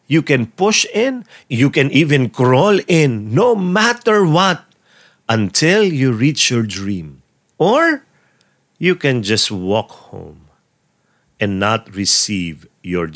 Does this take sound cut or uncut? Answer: uncut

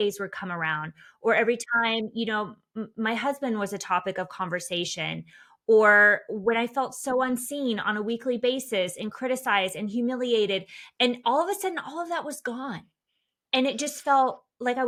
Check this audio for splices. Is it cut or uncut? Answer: uncut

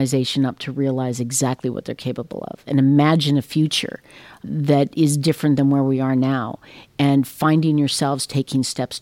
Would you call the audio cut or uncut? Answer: uncut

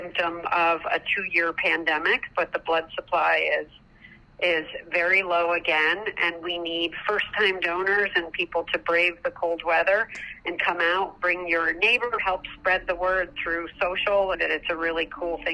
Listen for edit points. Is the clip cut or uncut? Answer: cut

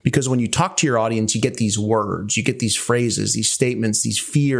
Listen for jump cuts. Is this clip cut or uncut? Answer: uncut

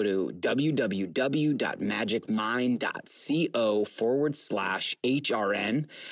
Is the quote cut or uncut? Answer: uncut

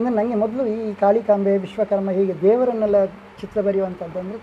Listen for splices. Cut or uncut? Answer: uncut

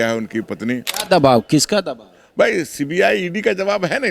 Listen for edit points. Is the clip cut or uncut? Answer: cut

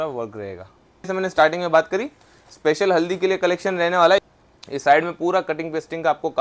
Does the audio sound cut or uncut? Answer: cut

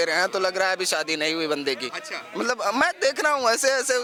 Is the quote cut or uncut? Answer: uncut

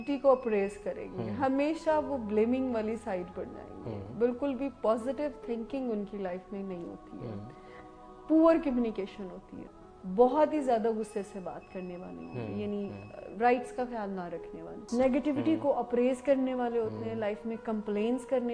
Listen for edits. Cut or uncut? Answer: uncut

